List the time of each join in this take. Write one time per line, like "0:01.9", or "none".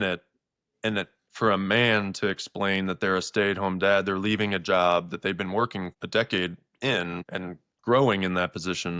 0:06.0
0:07.3